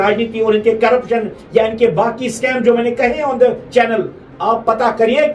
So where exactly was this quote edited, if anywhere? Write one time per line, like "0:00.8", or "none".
none